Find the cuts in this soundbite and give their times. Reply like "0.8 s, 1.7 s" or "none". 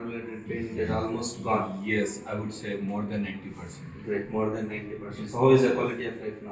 none